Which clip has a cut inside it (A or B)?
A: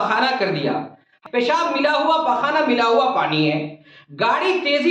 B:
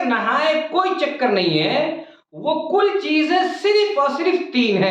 A